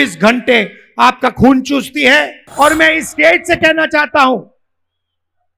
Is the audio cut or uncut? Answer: cut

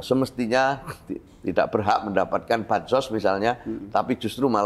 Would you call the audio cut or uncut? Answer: uncut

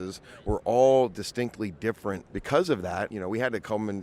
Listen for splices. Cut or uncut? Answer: cut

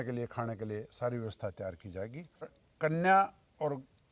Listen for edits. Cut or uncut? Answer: cut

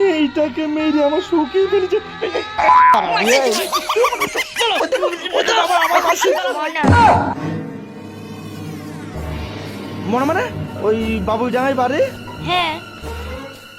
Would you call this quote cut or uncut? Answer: cut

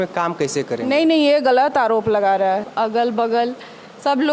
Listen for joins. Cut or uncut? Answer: cut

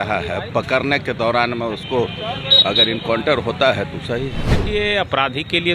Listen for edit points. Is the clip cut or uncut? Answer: cut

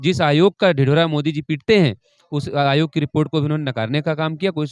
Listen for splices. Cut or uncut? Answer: uncut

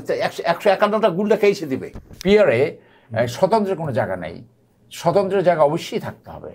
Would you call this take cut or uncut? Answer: cut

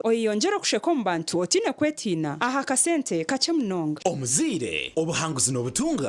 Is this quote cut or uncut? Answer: cut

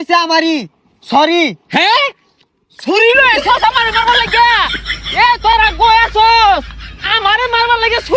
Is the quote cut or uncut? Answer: uncut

